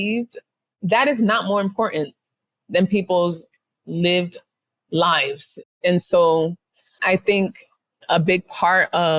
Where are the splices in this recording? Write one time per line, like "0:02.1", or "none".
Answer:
0:05.7